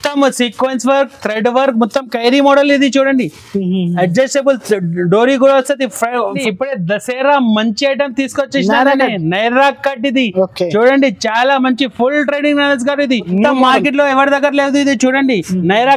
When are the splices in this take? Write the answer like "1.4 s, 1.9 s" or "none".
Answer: 6.4 s, 13.3 s

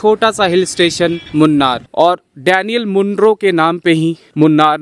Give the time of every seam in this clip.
1.8 s

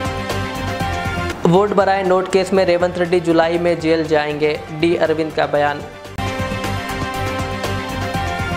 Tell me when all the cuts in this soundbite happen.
none

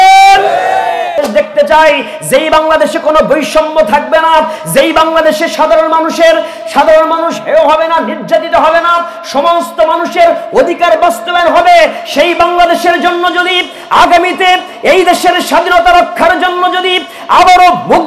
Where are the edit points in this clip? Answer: 1.1 s

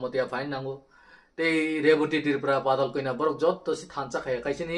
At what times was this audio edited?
none

